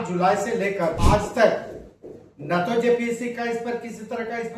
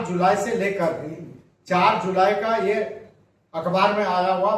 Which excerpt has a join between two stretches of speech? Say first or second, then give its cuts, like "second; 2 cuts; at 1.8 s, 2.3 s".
first; 1 cut; at 1.0 s